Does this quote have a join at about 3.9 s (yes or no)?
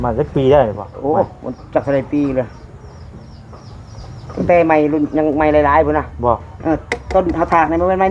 no